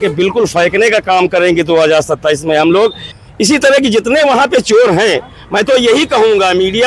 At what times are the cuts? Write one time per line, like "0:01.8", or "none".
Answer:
0:03.1